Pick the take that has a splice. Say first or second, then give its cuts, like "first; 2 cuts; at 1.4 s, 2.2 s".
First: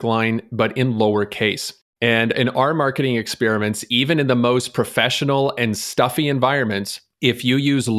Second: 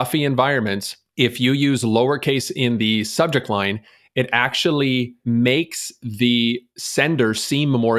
second; 1 cut; at 6.7 s